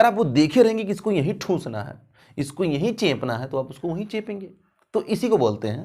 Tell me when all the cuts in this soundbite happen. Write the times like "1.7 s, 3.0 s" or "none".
none